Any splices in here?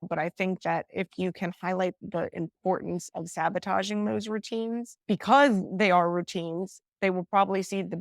yes; 1 cut; at 2.0 s

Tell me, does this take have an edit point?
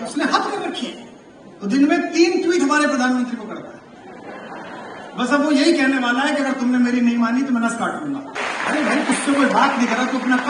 yes; 1 cut; at 8.3 s

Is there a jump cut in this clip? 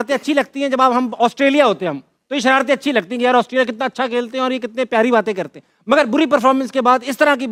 no; 0 cuts

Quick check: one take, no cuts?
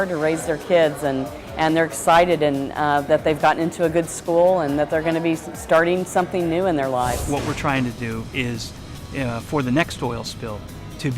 no; 1 cut; at 7.2 s

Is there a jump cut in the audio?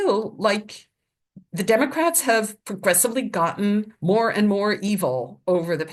no; 0 cuts

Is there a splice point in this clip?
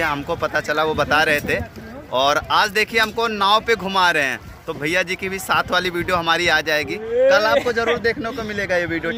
no; 0 cuts

